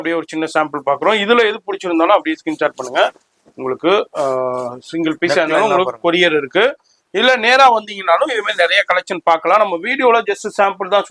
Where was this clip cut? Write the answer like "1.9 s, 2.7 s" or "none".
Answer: none

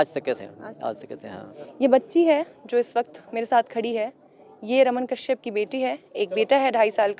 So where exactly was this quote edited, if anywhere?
1.6 s

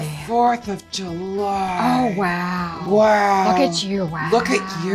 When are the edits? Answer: 2.8 s

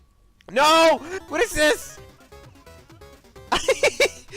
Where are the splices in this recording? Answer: 1.2 s

